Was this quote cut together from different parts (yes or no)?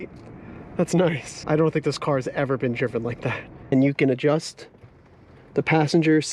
yes